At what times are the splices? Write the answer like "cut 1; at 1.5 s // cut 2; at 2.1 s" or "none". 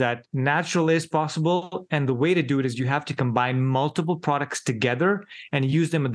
none